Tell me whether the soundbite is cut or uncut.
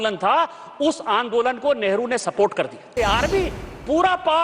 cut